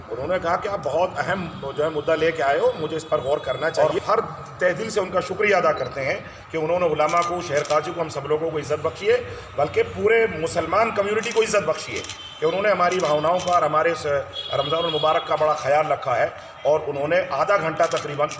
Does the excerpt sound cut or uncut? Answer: cut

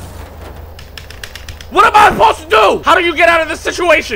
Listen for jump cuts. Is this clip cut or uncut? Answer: cut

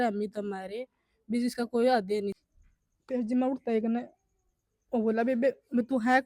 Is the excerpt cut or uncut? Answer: cut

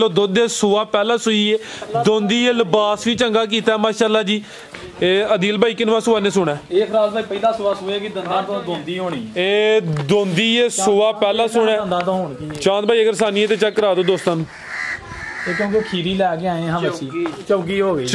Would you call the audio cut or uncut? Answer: cut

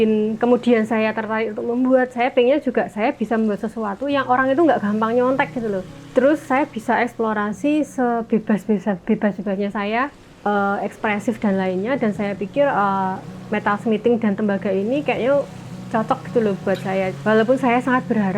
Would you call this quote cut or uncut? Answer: cut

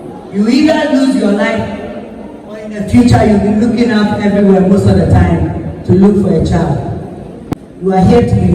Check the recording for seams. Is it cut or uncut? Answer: cut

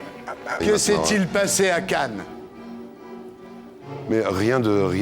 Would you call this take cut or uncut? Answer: uncut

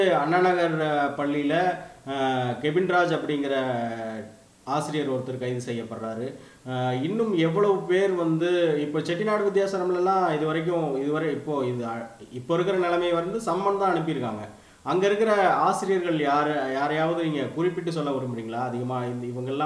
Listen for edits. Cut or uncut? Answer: uncut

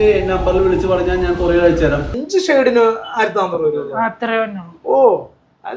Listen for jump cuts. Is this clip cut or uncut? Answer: cut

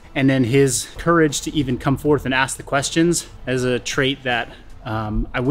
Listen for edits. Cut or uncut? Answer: cut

